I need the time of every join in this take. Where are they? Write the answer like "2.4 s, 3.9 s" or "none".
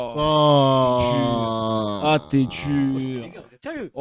none